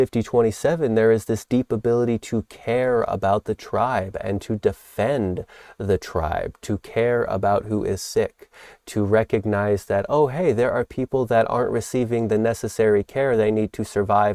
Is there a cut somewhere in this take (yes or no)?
no